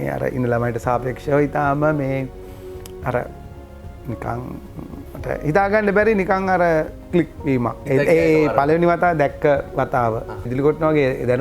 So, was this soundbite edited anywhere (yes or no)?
yes